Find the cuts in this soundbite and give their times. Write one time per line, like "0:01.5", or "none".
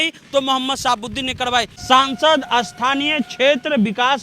0:01.7